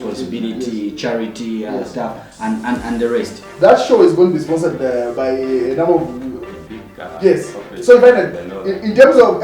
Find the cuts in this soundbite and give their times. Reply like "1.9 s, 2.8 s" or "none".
3.4 s